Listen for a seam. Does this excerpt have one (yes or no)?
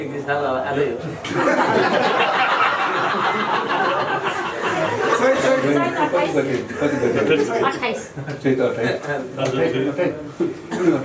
no